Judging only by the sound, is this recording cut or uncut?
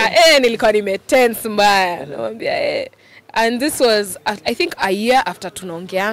uncut